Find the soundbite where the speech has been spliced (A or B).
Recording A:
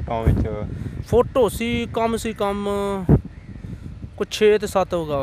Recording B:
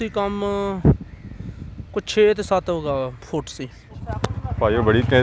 B